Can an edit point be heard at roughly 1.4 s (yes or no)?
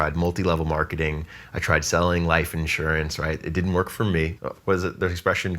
no